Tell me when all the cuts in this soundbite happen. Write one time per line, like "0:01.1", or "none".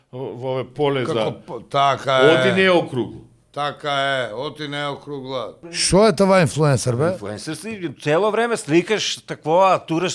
0:05.8